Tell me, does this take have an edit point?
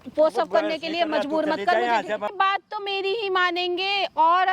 yes; 1 cut; at 2.3 s

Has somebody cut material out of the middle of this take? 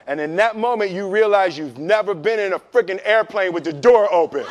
no; 0 cuts

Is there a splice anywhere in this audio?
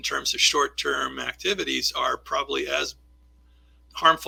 no; 0 cuts

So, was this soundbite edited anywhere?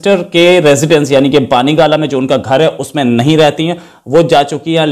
no; 0 cuts

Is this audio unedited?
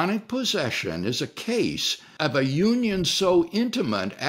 no; 1 cut; at 2.1 s

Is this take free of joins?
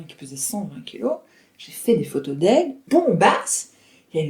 no; 1 cut; at 2.8 s

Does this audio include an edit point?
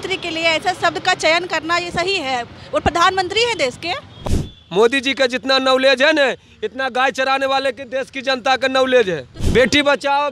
yes; 2 cuts; at 4.2 s, 9.4 s

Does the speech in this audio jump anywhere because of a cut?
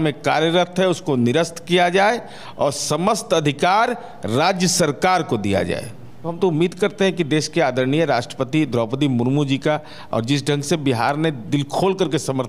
no; 0 cuts

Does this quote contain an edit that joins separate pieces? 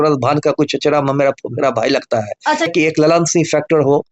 yes; 1 cut; at 2.7 s

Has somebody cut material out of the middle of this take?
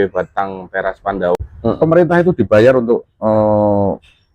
yes; 1 cut; at 1.4 s

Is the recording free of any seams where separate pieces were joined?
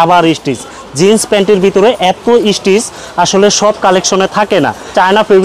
yes; 0 cuts

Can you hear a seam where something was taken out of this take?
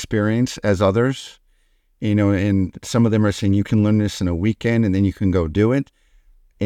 no; 0 cuts

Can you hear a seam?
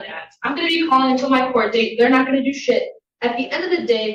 no; 0 cuts

